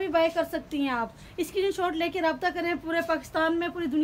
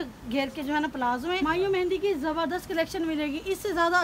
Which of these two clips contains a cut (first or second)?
second